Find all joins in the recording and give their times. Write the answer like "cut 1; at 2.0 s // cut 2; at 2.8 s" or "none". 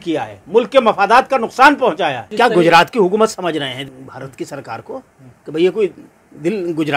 cut 1; at 2.3 s // cut 2; at 3.9 s